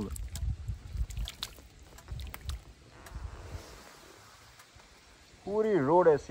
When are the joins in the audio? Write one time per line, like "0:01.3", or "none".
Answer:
none